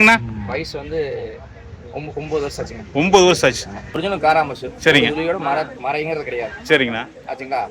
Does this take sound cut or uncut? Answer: cut